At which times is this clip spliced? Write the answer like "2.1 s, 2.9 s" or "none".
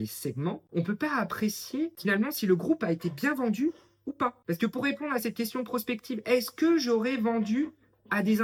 none